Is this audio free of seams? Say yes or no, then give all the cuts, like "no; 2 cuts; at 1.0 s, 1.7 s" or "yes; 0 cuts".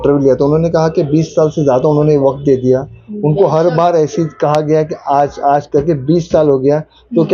yes; 0 cuts